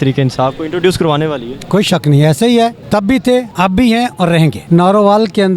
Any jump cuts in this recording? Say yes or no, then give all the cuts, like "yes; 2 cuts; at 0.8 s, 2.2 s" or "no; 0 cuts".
yes; 2 cuts; at 3.4 s, 4.6 s